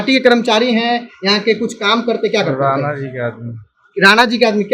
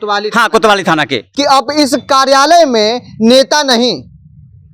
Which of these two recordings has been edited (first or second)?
second